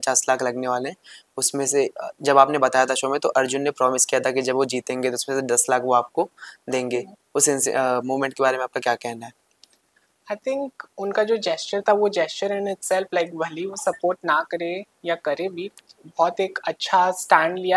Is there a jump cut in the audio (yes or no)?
no